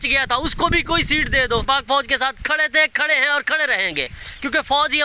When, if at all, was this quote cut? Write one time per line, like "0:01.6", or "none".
0:01.6